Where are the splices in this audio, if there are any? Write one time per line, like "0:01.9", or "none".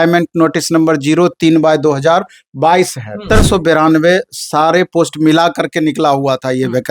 0:03.2